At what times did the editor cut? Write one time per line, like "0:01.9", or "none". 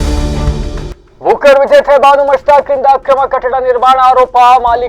0:00.9